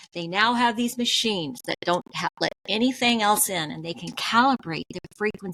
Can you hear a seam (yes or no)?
no